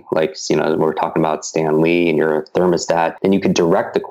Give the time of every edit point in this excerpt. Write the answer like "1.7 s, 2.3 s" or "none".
3.1 s